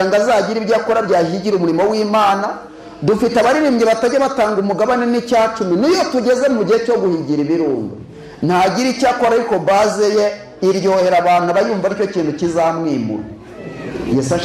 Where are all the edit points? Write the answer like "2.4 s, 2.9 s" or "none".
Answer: none

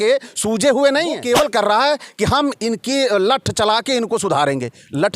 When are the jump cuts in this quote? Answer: 1.2 s

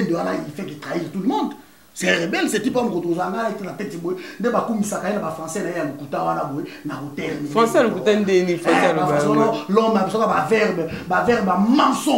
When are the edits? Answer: none

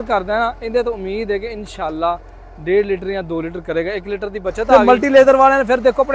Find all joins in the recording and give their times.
4.6 s

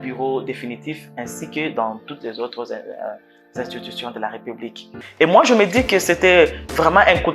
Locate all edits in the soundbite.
5.0 s

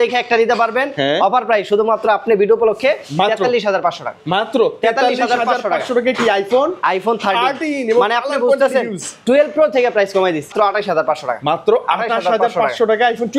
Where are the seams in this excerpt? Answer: 10.5 s

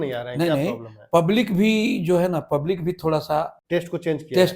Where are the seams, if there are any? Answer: 3.6 s

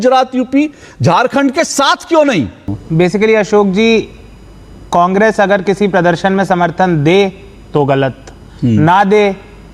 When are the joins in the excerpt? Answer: 2.9 s

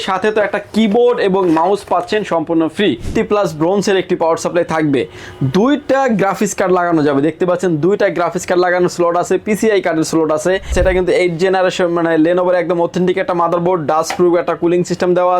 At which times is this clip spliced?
3.1 s, 10.7 s

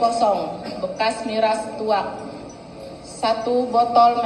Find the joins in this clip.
none

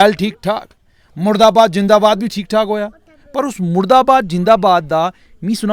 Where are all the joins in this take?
none

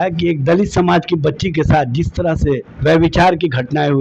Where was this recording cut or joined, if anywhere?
2.7 s

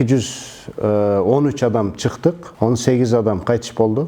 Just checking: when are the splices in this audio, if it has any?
2.5 s

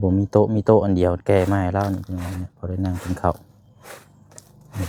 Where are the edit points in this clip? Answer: none

